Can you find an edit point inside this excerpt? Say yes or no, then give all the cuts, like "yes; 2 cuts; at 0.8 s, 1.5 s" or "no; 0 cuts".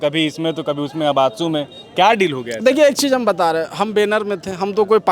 no; 0 cuts